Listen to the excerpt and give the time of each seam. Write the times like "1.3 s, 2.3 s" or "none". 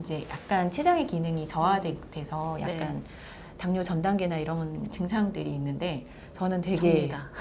none